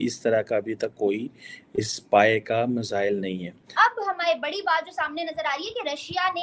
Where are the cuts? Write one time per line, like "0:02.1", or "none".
0:03.6